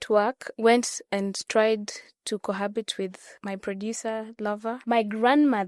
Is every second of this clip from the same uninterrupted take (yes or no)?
no